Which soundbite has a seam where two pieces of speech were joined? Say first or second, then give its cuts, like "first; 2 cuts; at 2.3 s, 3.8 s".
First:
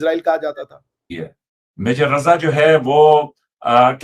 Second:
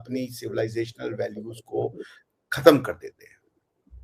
first; 1 cut; at 1.1 s